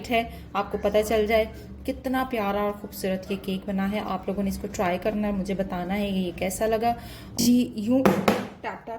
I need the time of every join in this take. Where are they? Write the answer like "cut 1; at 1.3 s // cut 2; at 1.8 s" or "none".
cut 1; at 7.2 s